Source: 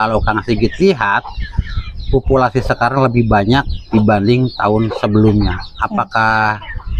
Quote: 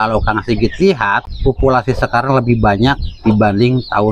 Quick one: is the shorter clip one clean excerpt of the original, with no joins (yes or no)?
no